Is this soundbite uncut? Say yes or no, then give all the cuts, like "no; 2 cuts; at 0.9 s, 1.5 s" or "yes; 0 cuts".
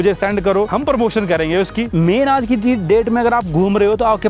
no; 1 cut; at 1.9 s